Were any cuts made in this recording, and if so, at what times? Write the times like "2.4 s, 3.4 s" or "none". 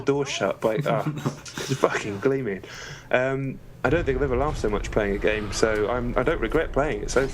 3.7 s